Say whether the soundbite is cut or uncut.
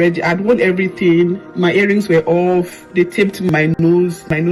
uncut